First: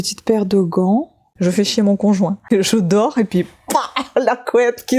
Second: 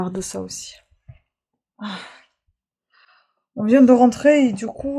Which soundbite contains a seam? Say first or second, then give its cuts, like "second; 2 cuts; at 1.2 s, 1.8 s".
first; 2 cuts; at 1.2 s, 2.4 s